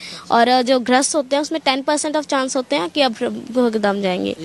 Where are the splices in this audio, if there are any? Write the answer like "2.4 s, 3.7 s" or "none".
none